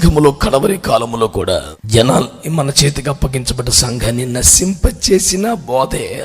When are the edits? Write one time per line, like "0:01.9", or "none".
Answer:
0:01.8